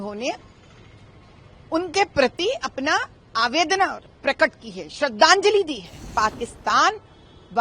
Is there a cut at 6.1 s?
yes; 1 cut; at 6.1 s

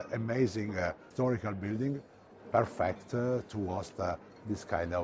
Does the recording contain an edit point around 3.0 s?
no; 1 cut; at 1.0 s

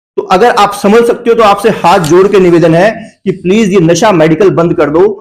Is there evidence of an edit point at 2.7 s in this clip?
no; 0 cuts

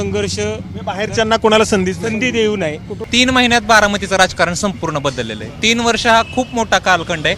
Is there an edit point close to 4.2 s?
no; 1 cut; at 2.9 s

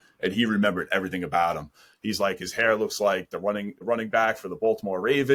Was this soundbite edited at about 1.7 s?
no; 0 cuts

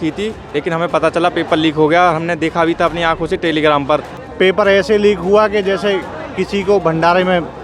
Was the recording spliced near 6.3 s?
no; 1 cut; at 4.2 s

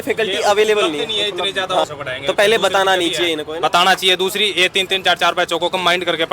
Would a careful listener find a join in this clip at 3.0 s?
no; 1 cut; at 1.8 s

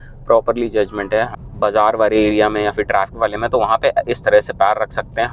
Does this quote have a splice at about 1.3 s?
yes; 1 cut; at 1.3 s

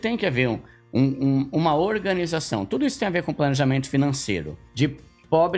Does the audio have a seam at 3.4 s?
no; 1 cut; at 4.6 s

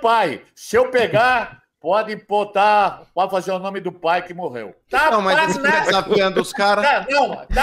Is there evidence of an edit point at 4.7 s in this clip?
yes; 1 cut; at 4.7 s

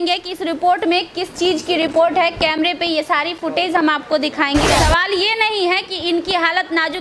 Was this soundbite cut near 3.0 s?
no; 1 cut; at 4.7 s

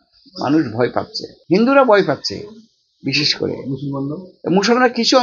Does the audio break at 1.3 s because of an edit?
yes; 1 cut; at 1.3 s

